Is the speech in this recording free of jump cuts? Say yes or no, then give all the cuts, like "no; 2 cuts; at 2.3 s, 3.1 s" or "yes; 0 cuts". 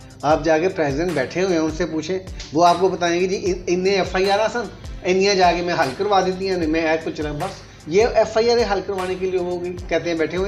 yes; 0 cuts